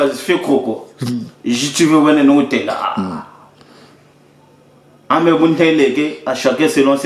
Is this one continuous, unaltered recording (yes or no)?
yes